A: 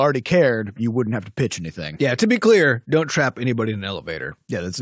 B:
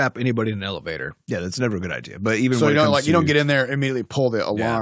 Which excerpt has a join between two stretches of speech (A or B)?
A